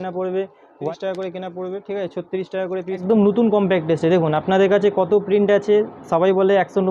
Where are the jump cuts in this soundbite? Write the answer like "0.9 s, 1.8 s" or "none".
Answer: 0.9 s, 3.0 s